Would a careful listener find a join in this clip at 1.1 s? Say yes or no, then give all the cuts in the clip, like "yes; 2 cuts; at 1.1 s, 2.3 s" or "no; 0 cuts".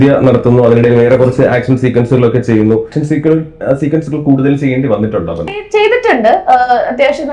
no; 2 cuts; at 3.0 s, 5.6 s